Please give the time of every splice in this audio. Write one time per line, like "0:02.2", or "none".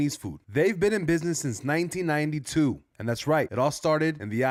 none

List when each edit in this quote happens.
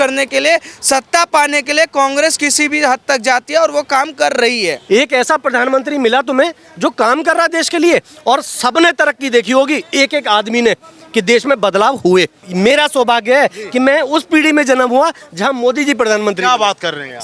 0:04.8
0:12.5

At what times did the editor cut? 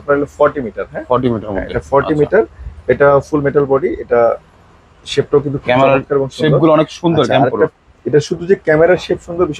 none

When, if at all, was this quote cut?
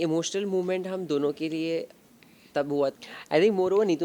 0:02.9

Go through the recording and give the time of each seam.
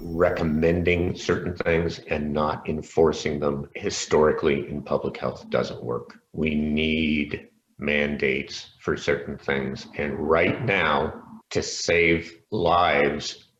none

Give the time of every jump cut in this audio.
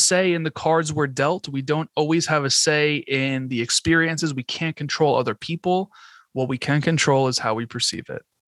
none

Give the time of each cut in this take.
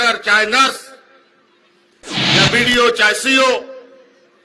0:02.3

